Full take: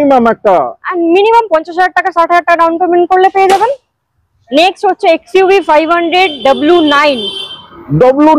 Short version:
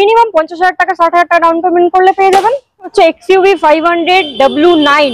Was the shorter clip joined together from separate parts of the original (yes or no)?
yes